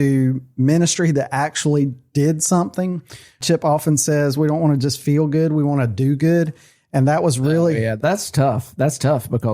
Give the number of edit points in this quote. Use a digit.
2